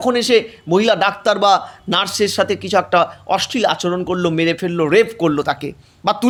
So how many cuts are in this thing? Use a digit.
0